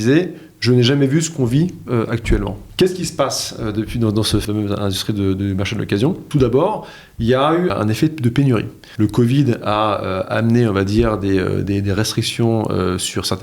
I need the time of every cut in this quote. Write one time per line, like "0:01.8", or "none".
0:02.6
0:04.4
0:06.2
0:07.7
0:08.8